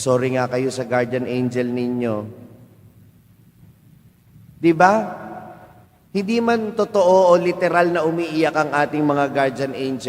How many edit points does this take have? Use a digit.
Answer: 0